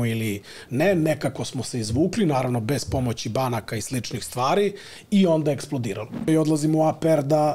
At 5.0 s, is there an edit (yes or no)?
no